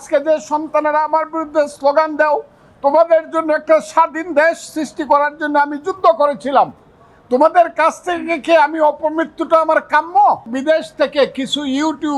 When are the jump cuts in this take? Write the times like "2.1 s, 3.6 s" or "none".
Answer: 10.5 s